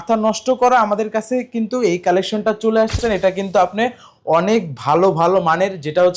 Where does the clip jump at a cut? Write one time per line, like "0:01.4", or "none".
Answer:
0:02.9